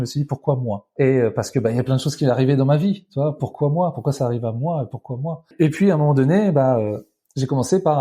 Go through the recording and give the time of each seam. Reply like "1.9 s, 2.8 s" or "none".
0.9 s, 5.5 s